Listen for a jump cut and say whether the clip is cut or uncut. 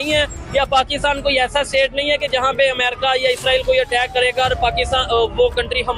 uncut